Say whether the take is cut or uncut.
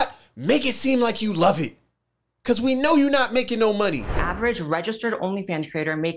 cut